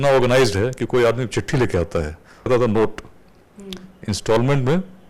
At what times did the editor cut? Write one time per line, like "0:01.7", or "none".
0:02.5